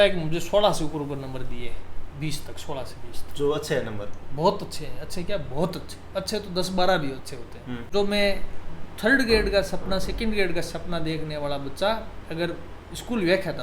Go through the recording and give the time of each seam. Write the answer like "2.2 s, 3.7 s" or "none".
7.9 s